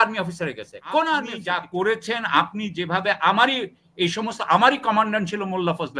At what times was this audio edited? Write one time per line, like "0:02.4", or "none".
0:01.4